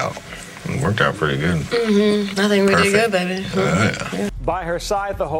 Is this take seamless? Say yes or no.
no